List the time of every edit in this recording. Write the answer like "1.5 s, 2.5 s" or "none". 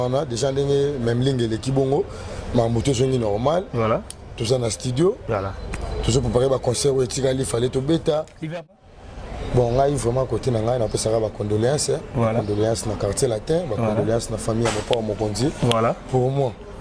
8.7 s

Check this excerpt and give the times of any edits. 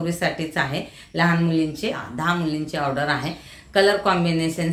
2.0 s

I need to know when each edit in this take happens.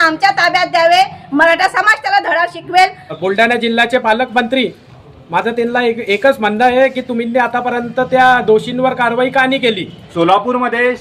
3.2 s, 10.0 s

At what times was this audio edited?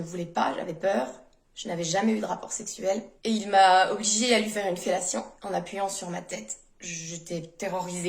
6.7 s

